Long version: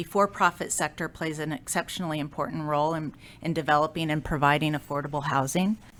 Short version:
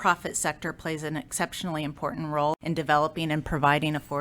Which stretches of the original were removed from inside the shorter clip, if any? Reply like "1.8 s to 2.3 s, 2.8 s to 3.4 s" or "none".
2.9 s to 3.4 s